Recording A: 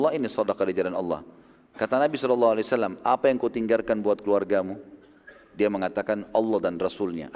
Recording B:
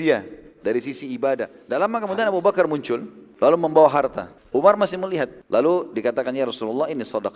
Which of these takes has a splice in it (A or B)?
B